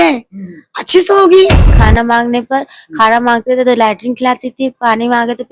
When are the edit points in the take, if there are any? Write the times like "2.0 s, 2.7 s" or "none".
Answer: 1.8 s